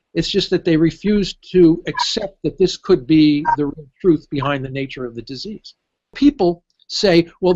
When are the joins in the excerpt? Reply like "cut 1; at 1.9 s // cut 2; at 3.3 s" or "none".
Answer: cut 1; at 6.1 s